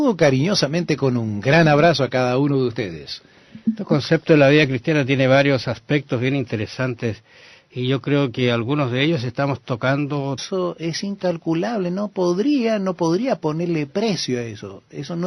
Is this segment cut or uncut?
uncut